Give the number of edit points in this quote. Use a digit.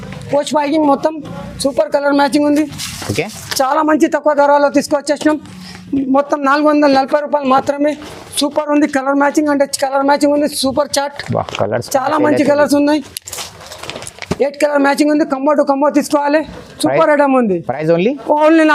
0